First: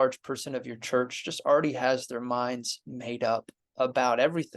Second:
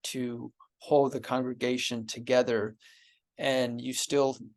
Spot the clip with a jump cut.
first; 1 cut; at 3.6 s

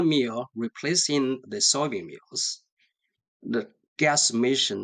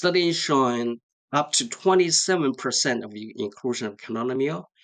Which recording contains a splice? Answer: second; 1 cut; at 1.1 s

